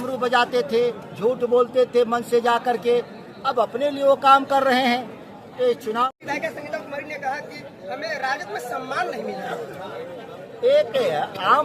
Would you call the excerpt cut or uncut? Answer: cut